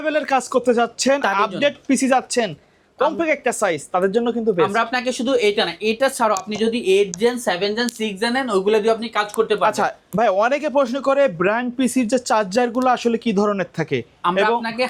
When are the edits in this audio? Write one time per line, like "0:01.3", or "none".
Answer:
none